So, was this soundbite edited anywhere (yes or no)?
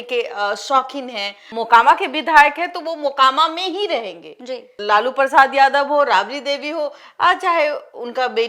yes